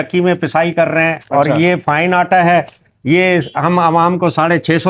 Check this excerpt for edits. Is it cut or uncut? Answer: uncut